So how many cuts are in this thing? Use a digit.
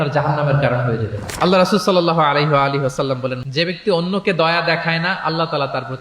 1